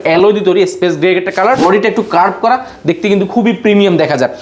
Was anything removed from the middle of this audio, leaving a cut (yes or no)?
yes